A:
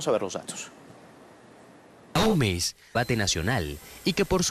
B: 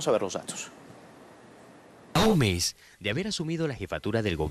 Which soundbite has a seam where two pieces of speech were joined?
B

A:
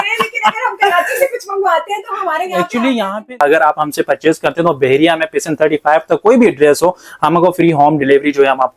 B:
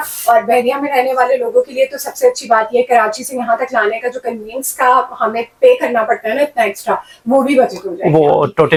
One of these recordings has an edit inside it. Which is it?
A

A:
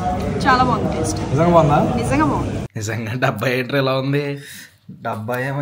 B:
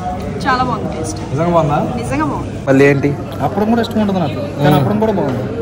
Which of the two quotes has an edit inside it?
A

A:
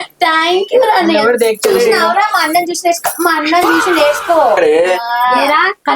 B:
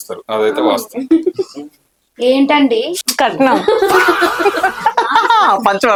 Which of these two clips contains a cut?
A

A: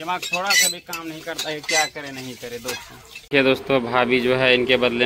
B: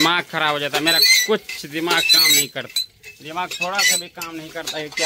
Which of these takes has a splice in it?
A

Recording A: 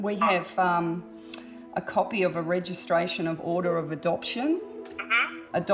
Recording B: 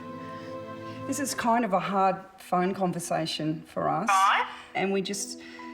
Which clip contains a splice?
B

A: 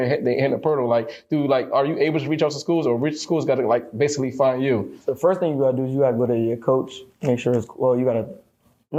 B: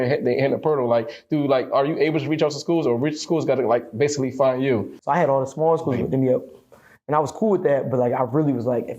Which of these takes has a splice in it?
B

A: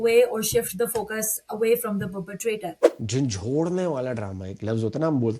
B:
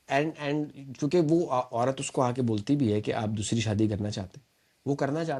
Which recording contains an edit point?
A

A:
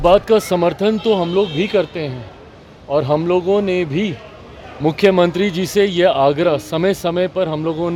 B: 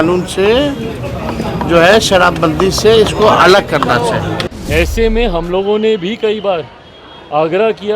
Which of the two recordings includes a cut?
B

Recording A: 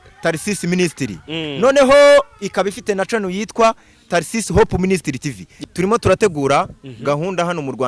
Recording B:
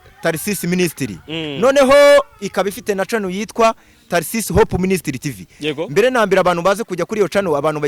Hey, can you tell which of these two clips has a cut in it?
A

